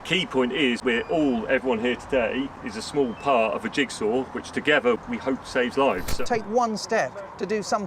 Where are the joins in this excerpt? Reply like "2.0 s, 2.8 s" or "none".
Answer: 0.8 s, 2.7 s, 5.0 s, 6.1 s